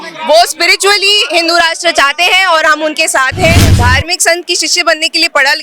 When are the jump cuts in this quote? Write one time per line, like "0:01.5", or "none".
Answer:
0:03.7